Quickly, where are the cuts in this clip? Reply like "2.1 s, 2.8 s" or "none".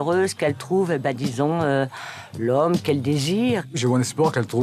3.7 s